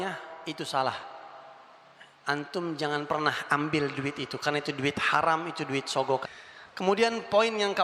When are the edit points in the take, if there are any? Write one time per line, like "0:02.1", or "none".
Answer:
0:06.3